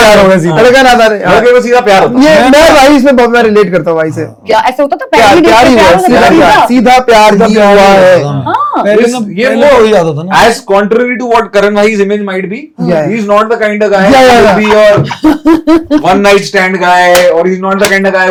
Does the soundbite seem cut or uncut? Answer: uncut